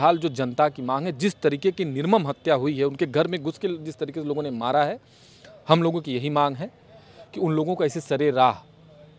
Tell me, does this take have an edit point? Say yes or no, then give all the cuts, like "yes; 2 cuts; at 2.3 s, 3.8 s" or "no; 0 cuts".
no; 0 cuts